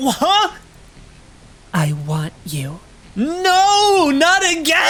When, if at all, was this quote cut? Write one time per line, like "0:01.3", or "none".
none